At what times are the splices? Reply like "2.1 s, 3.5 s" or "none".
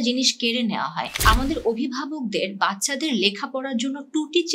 1.1 s